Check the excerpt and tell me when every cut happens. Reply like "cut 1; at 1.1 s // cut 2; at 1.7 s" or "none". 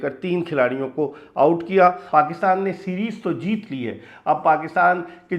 cut 1; at 2.0 s